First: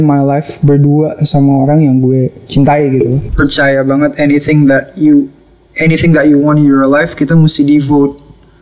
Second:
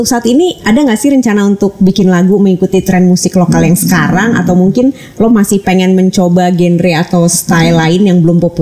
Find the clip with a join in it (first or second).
first